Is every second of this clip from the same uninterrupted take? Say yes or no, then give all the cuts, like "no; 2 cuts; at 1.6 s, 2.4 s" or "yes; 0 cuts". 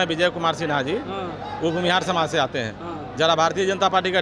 yes; 0 cuts